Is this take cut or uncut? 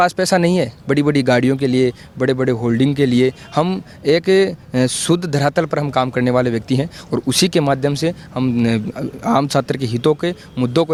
uncut